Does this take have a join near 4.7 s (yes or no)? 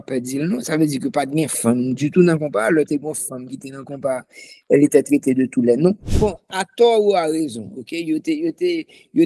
no